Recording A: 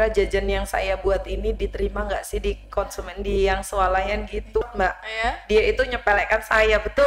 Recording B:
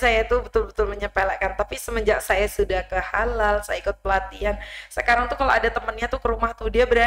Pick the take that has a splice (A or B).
A